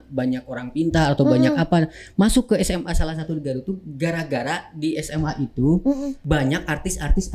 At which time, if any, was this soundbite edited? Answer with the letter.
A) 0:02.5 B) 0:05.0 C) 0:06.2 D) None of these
C